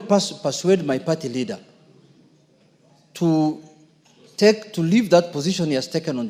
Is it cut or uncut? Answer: uncut